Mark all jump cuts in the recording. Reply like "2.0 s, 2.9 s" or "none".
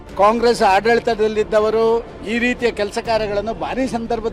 none

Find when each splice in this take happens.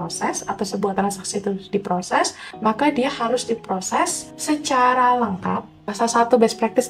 2.4 s, 4.3 s, 5.8 s

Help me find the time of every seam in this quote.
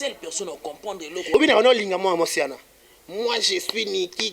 1.3 s

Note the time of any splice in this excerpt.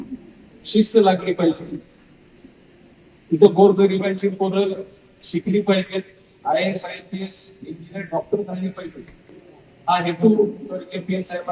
none

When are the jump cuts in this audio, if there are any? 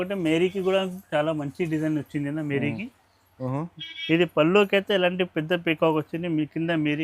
3.3 s

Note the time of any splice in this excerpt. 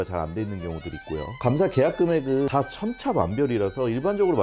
1.4 s, 2.5 s

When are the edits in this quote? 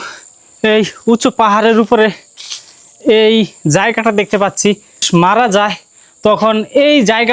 5.1 s

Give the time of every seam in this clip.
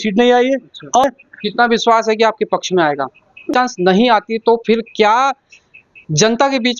1.0 s, 3.4 s

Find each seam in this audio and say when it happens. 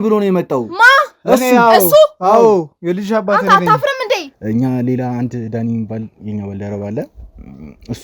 4.3 s

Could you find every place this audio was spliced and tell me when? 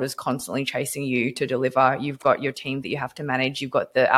none

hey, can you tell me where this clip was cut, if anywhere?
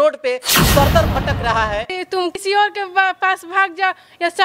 2.1 s

